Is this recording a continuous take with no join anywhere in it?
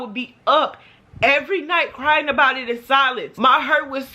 no; 1 cut; at 3.3 s

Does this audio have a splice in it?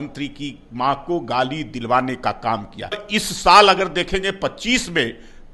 yes; 1 cut; at 3.1 s

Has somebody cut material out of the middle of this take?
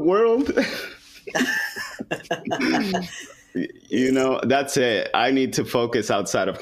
no; 0 cuts

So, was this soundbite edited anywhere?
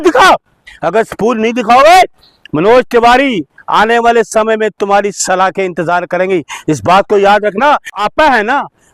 yes; 1 cut; at 7.9 s

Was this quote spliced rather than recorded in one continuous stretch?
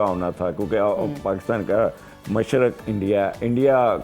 no; 0 cuts

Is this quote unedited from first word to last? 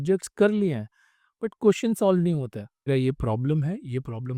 no; 1 cut; at 2.9 s

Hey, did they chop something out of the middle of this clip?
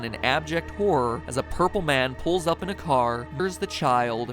yes; 1 cut; at 3.3 s

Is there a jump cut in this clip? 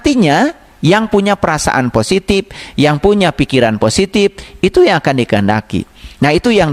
no; 0 cuts

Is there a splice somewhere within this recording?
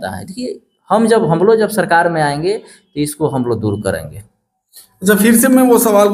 no; 0 cuts

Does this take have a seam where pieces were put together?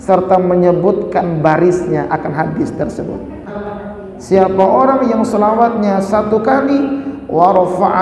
yes; 1 cut; at 3.6 s

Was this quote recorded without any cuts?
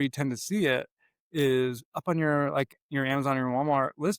yes; 0 cuts

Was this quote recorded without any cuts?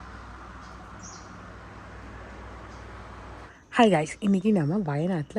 no; 1 cut; at 3.5 s

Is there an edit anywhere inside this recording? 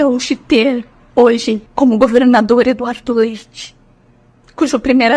yes; 1 cut; at 1.7 s

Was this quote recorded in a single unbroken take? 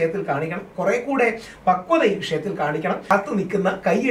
no; 1 cut; at 3.1 s

